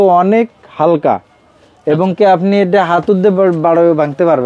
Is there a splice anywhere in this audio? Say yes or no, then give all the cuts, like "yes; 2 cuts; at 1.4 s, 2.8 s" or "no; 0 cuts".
no; 0 cuts